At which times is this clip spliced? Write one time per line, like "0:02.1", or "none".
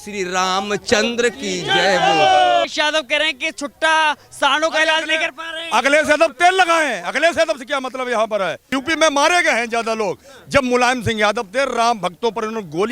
0:02.7
0:08.6